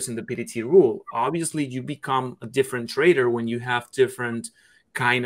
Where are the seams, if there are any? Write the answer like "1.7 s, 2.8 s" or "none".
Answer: none